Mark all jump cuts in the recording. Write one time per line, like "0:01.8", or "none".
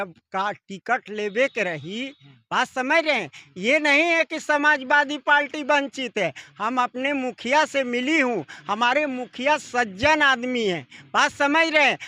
none